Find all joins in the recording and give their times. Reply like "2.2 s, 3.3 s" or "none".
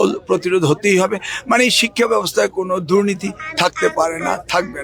none